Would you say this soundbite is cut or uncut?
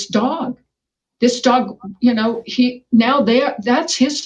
uncut